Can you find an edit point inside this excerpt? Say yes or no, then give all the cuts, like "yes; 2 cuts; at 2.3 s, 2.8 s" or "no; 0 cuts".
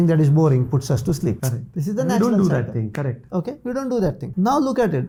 no; 0 cuts